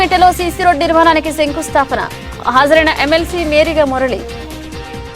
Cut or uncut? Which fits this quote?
cut